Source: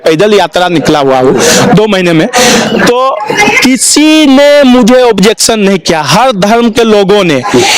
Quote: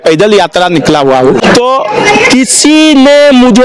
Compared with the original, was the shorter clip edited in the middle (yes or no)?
yes